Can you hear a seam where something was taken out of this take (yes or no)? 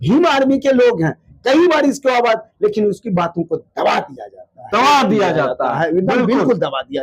no